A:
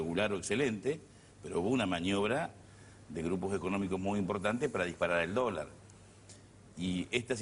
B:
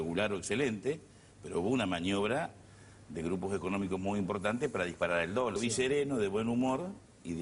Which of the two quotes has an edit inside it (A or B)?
A